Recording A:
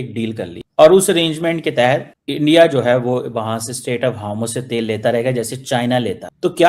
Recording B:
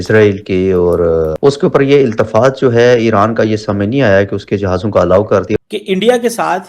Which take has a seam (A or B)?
B